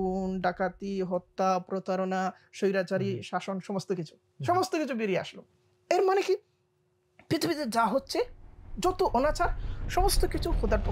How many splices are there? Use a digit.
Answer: 0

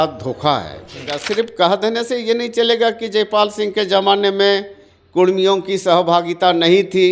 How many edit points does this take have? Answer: 1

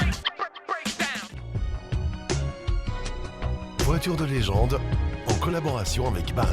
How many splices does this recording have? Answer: 1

